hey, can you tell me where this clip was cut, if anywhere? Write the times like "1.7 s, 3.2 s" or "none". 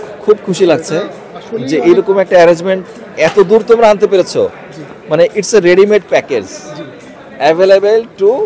none